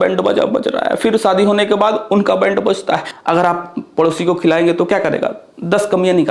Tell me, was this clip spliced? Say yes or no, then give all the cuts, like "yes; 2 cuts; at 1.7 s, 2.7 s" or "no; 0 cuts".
yes; 1 cut; at 3.1 s